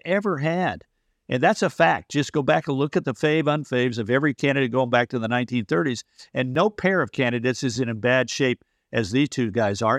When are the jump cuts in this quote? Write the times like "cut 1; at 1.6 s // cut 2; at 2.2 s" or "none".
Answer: cut 1; at 6.5 s // cut 2; at 7.7 s

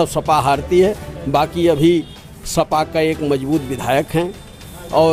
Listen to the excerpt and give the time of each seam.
none

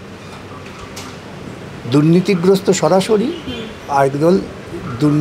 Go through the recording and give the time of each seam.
none

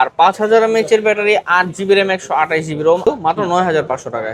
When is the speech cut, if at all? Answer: cut 1; at 3.1 s

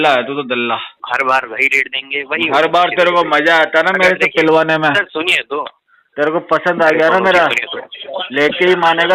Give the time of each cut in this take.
cut 1; at 0.9 s

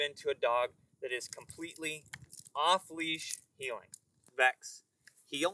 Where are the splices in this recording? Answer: cut 1; at 4.2 s

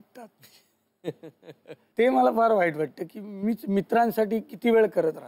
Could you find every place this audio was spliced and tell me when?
cut 1; at 1.8 s

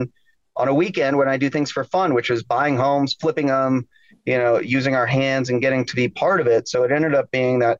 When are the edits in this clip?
none

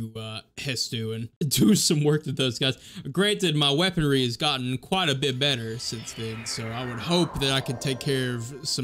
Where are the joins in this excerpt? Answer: cut 1; at 1.3 s

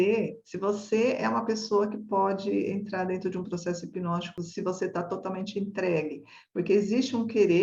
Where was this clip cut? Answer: cut 1; at 4.4 s

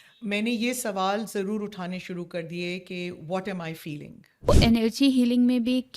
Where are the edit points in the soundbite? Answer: cut 1; at 4.5 s

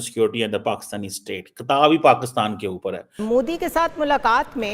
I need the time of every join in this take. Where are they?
cut 1; at 3.2 s

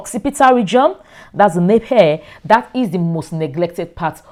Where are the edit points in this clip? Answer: none

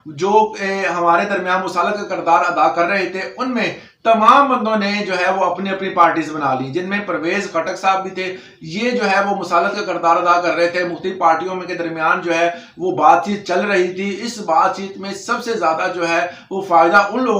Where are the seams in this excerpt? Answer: none

